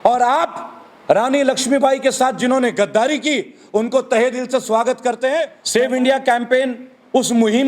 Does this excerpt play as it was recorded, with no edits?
no; 1 cut; at 5.6 s

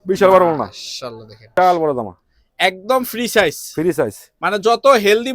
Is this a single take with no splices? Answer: no; 1 cut; at 1.5 s

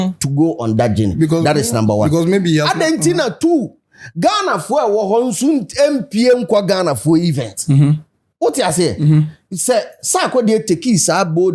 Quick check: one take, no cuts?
yes; 0 cuts

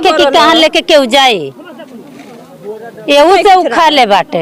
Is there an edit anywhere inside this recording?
no; 0 cuts

